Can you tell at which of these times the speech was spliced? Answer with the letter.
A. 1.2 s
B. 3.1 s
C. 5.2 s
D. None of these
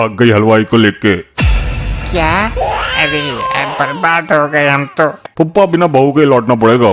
C